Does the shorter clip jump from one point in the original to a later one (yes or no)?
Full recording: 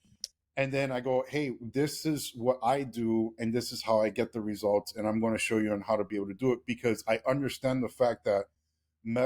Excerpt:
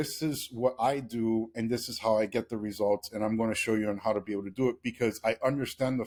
no